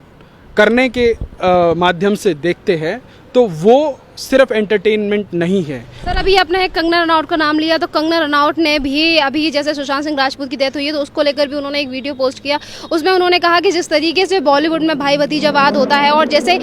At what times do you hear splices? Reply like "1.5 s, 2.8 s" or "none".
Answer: none